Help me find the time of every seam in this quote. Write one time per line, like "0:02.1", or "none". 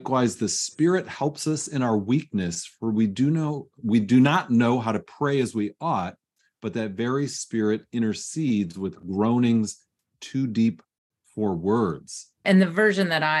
0:12.4